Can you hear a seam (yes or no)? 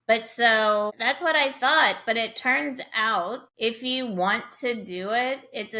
yes